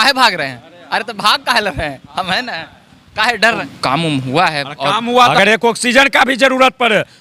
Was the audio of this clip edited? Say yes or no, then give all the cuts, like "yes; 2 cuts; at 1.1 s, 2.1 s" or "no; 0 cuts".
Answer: yes; 2 cuts; at 3.6 s, 5.3 s